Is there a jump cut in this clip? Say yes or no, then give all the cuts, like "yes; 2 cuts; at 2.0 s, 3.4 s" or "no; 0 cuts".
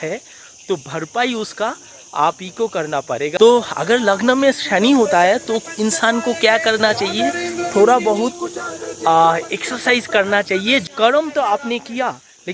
yes; 2 cuts; at 3.3 s, 10.8 s